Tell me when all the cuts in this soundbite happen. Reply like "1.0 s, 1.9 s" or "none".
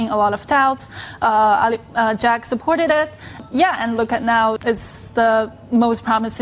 3.4 s, 4.6 s